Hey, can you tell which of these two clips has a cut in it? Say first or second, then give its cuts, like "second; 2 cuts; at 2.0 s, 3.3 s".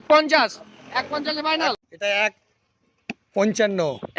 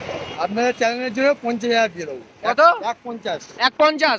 first; 1 cut; at 1.9 s